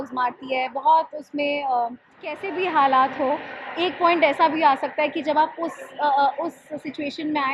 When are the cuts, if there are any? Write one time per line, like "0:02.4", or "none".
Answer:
0:02.5